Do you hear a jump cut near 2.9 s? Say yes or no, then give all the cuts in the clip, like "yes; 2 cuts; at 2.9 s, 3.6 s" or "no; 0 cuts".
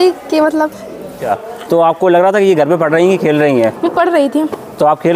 no; 1 cut; at 1.2 s